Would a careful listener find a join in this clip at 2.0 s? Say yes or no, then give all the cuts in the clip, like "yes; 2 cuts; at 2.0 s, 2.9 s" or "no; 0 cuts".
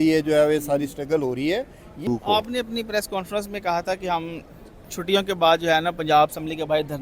yes; 1 cut; at 2.0 s